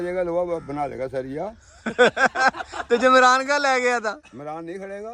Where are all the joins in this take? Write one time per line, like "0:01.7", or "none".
none